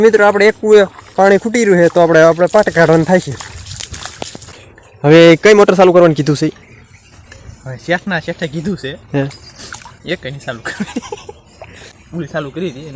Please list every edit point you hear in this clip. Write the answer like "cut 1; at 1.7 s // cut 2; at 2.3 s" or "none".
cut 1; at 1.1 s // cut 2; at 4.5 s // cut 3; at 11.8 s